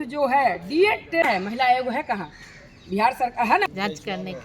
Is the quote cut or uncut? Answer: cut